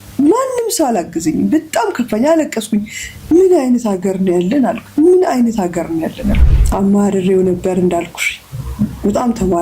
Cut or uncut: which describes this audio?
cut